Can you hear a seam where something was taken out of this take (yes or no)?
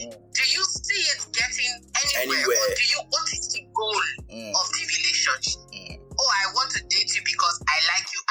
no